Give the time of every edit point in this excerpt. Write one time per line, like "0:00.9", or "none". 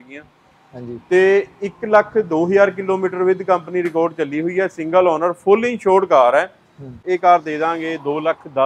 0:06.9

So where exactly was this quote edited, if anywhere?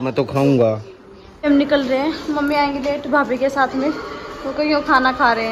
0:01.4

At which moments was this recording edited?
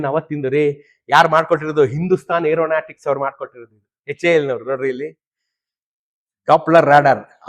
none

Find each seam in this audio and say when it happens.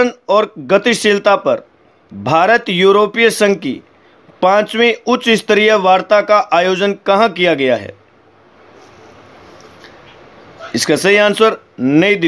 0:08.9

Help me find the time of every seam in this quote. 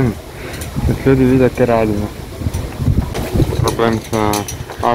0:03.1

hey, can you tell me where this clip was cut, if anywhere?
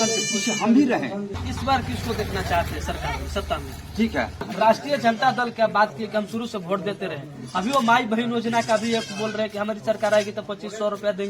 0:01.5
0:04.4

